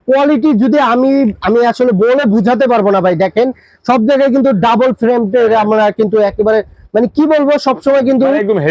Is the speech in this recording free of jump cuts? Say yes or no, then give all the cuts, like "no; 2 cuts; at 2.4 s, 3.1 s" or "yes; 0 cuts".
yes; 0 cuts